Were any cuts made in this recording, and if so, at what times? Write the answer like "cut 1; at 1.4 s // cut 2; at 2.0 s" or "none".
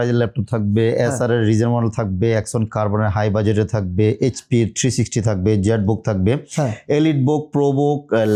none